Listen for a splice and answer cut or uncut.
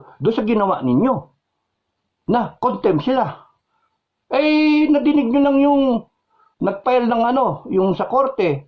uncut